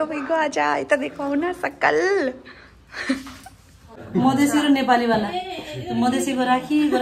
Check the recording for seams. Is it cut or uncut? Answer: cut